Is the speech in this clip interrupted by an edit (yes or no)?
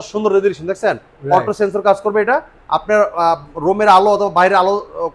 no